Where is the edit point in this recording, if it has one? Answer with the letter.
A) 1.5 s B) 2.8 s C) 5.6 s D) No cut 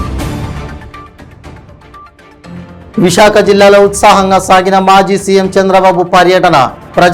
B